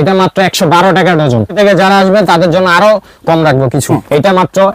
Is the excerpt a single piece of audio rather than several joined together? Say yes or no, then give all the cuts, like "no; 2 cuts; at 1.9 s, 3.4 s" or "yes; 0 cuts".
no; 2 cuts; at 1.6 s, 3.9 s